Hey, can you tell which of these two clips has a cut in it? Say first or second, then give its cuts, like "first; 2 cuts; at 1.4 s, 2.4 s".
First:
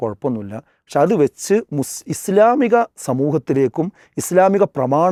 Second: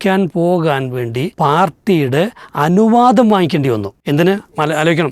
second; 2 cuts; at 1.3 s, 3.9 s